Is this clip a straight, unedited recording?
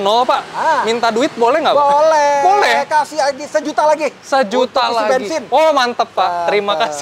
yes; 0 cuts

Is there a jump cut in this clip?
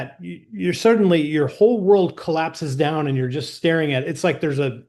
no; 0 cuts

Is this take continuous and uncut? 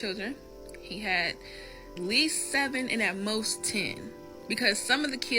no; 1 cut; at 2.0 s

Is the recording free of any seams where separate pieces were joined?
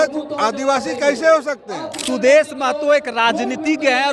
no; 1 cut; at 1.9 s

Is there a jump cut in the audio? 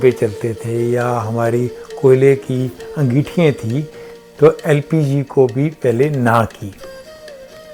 no; 0 cuts

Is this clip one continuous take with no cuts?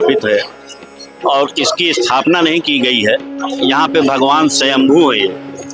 yes; 0 cuts

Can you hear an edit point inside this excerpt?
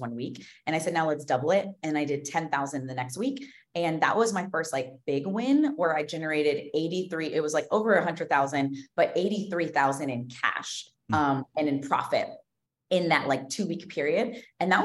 no; 0 cuts

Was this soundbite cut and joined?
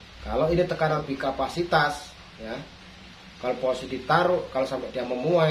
yes; 1 cut; at 1.0 s

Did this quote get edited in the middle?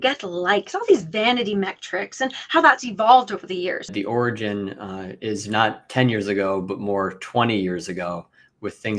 yes; 1 cut; at 3.9 s

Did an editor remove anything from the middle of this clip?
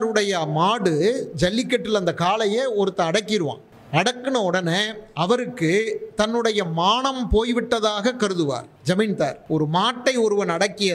yes; 3 cuts; at 3.7 s, 8.7 s, 9.4 s

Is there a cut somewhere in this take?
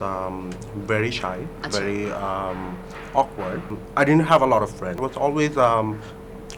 yes; 2 cuts; at 3.7 s, 5.0 s

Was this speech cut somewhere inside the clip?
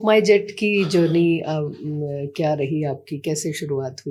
no; 0 cuts

